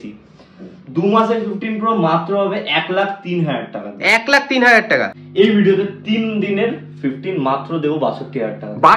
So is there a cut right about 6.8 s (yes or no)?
no